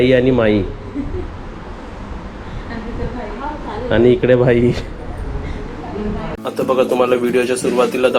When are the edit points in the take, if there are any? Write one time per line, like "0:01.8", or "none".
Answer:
0:06.3